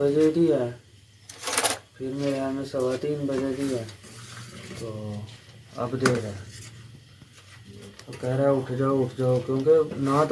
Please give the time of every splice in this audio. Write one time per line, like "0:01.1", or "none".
none

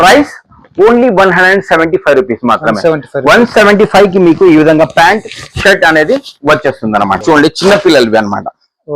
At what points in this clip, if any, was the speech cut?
0:07.2

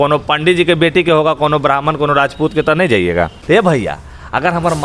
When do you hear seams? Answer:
0:03.4

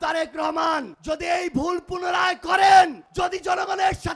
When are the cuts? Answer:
0:00.9
0:03.0

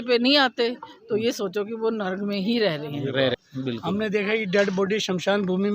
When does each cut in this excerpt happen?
0:03.4

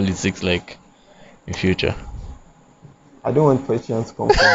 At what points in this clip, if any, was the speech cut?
none

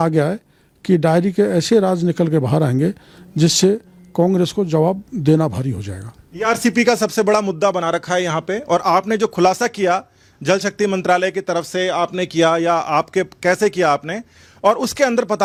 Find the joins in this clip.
none

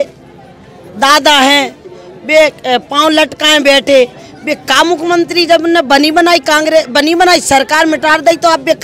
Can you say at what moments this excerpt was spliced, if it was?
none

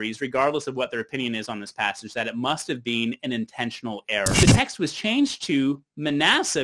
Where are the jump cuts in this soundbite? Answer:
0:04.4

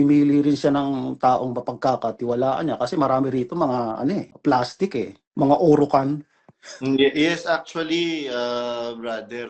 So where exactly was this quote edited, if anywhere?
0:05.2

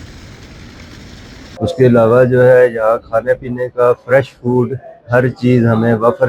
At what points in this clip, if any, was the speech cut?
0:01.6

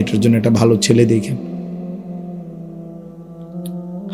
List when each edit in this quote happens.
none

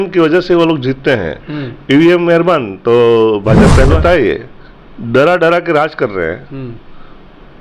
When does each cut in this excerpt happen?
0:04.0

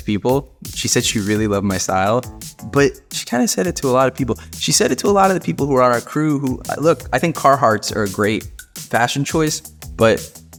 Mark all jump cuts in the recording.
none

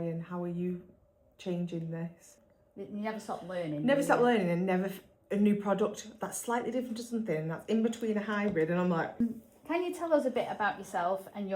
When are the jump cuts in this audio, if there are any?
0:02.4
0:09.2

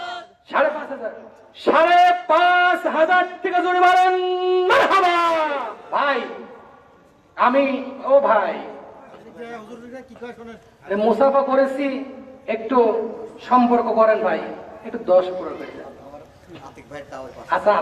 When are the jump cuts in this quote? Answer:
0:05.7

